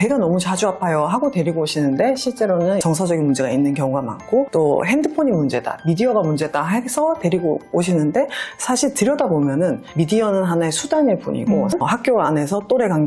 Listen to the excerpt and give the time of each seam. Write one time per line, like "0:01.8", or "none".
0:04.5
0:11.8